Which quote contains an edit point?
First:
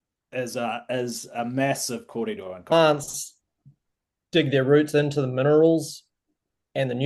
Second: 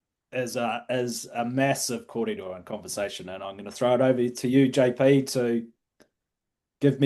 first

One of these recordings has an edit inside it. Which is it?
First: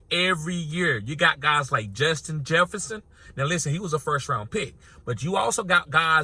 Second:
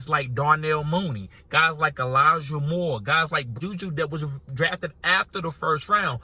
second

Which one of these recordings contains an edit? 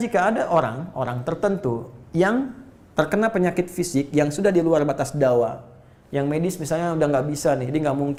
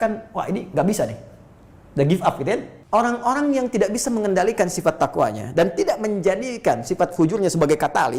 second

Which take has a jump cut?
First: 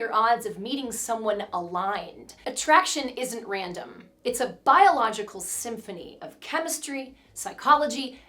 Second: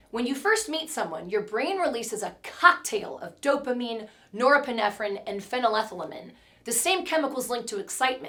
first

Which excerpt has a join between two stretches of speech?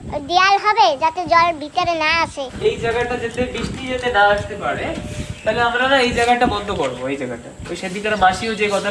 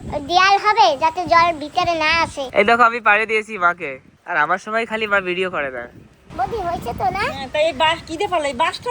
second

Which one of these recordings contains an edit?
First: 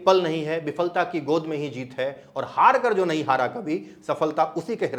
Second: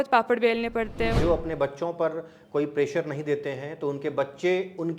second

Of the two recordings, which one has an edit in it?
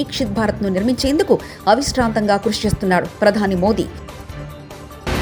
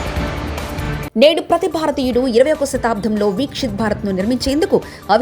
second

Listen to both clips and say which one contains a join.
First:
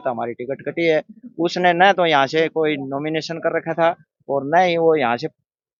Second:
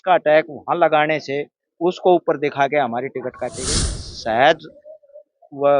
second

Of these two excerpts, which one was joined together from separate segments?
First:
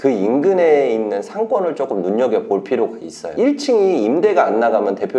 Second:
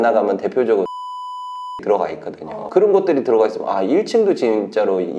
first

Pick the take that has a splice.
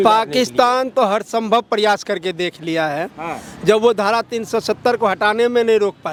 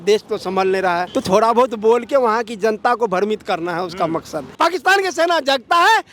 second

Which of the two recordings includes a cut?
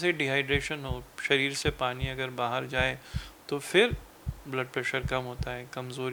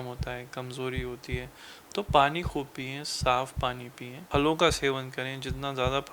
second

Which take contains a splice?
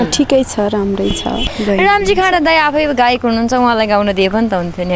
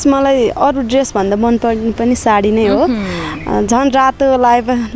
first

